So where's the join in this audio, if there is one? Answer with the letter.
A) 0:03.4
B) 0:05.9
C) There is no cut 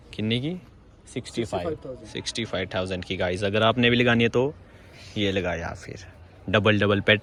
C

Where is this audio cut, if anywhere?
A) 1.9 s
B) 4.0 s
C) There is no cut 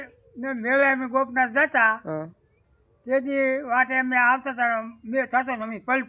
C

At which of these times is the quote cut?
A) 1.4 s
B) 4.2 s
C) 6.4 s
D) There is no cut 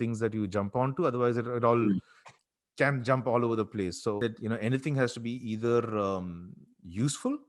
B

